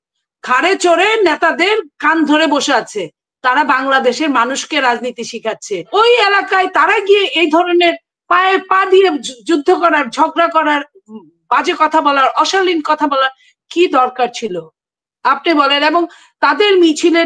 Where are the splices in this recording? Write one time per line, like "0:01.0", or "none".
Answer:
0:05.9